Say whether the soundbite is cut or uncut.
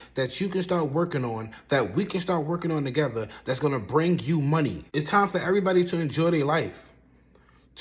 cut